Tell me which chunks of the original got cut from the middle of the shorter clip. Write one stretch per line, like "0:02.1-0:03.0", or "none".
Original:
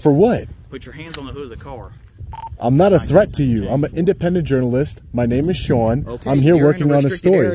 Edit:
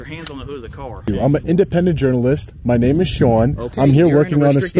0:02.0-0:03.6